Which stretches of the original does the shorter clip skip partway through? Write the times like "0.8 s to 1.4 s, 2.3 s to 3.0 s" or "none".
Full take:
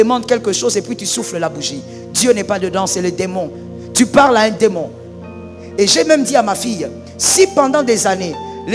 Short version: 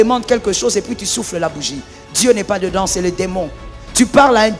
none